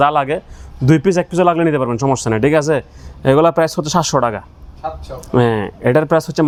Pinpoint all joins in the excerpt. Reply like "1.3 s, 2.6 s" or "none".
none